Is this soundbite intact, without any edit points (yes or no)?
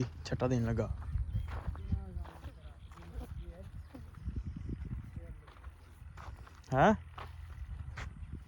yes